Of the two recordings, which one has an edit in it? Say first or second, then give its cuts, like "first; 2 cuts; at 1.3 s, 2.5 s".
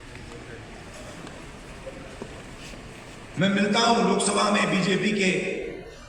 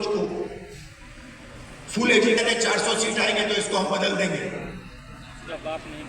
second; 1 cut; at 2.4 s